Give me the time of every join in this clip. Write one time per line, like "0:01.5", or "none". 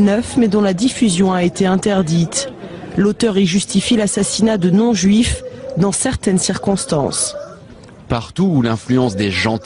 none